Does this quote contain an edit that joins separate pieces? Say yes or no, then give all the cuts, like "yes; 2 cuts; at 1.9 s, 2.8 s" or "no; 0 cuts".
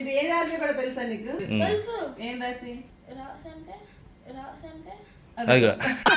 yes; 2 cuts; at 1.4 s, 2.9 s